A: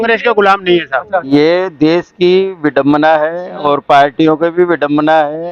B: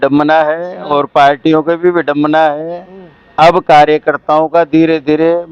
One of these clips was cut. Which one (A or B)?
A